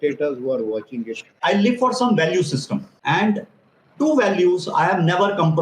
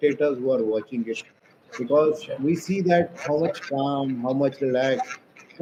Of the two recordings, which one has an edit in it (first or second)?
first